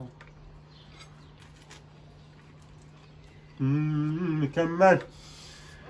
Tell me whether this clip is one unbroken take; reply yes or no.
yes